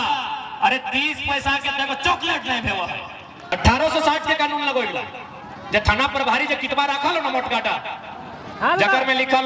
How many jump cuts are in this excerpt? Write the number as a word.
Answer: one